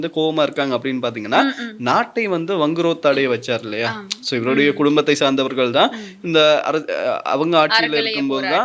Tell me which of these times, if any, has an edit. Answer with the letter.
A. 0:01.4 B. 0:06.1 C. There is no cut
C